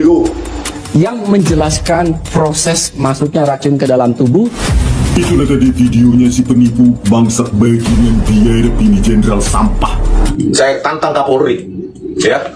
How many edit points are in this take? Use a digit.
1